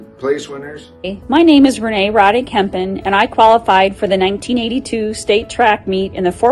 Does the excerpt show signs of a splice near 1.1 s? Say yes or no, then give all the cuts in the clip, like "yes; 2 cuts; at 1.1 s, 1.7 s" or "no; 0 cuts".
yes; 1 cut; at 1.1 s